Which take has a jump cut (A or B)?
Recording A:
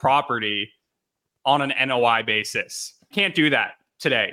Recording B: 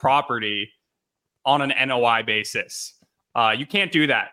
A